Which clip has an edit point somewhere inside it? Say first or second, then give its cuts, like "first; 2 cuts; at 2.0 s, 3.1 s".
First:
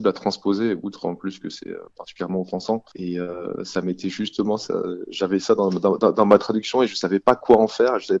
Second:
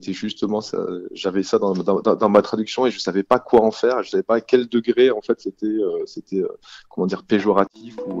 first; 1 cut; at 2.9 s